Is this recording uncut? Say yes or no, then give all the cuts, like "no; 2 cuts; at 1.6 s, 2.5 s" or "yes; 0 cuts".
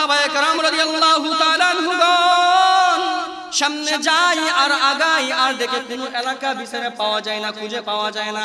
no; 1 cut; at 3.4 s